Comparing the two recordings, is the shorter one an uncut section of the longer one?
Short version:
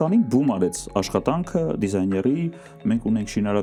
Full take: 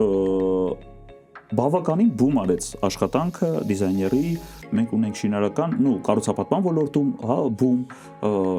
yes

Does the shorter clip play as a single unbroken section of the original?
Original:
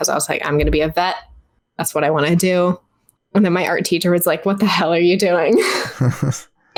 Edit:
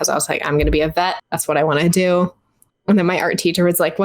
no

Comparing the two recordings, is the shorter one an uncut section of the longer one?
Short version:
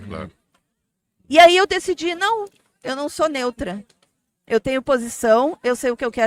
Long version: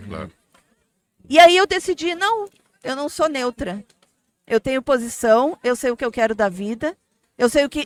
yes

